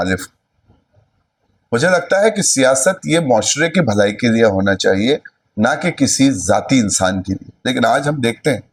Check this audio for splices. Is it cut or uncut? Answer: uncut